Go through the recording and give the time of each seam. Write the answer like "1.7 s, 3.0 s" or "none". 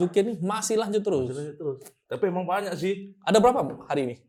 none